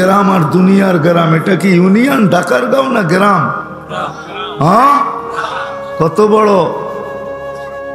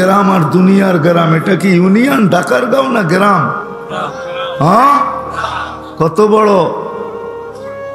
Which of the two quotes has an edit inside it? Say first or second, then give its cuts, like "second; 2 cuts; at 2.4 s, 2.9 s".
first; 1 cut; at 7.0 s